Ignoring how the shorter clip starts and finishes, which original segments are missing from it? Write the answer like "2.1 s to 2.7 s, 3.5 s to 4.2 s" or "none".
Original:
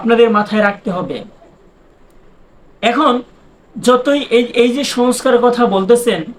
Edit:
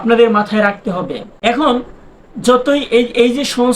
1.3 s to 2.7 s